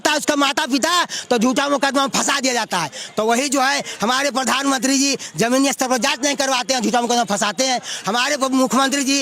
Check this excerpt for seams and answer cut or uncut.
uncut